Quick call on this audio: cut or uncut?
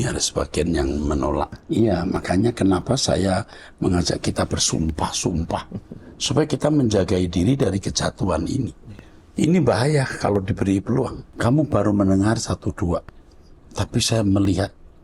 cut